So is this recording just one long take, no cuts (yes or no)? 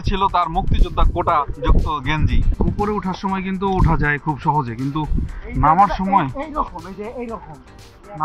no